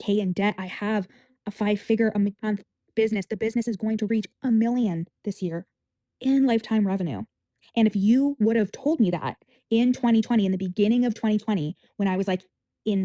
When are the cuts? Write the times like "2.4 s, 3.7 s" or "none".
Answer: none